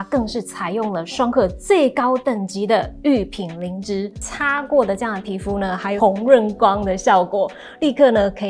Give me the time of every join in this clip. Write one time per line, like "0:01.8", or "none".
0:04.3
0:06.0